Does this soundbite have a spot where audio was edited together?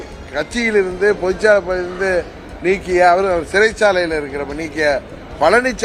no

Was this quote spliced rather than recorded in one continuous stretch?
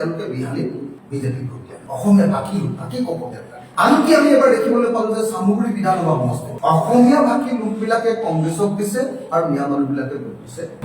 no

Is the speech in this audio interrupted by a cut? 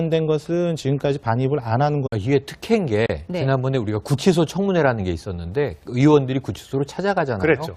no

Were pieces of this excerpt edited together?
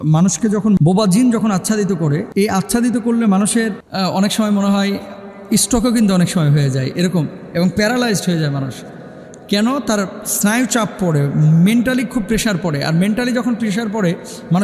yes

